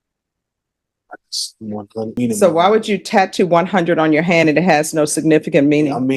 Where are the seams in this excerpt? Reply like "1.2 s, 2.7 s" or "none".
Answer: 2.1 s